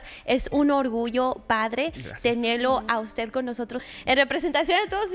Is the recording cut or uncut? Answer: cut